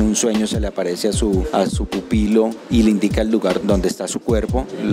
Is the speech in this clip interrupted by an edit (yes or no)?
yes